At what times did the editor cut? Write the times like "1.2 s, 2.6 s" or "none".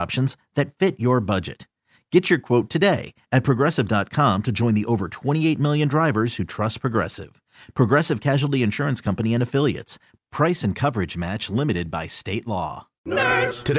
12.9 s